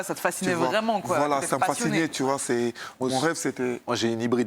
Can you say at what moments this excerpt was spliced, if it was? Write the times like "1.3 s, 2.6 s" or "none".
none